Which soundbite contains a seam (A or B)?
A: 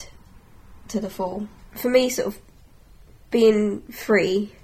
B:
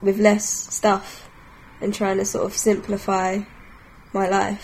A